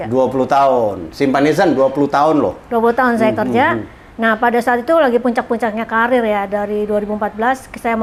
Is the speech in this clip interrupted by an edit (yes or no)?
no